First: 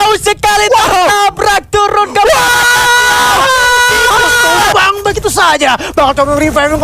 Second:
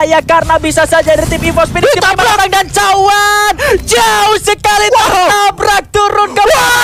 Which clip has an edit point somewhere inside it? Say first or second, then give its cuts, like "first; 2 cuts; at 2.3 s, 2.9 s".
first; 1 cut; at 4.7 s